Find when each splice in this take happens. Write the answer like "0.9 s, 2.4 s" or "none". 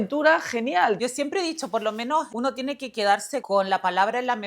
1.0 s, 2.3 s, 3.4 s